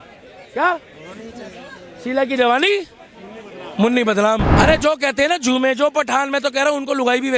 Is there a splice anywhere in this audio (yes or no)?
yes